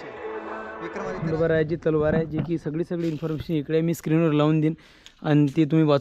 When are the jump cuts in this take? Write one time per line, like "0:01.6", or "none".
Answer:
0:01.2